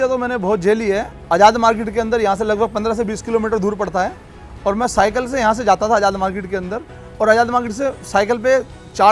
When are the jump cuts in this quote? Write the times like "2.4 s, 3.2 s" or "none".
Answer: none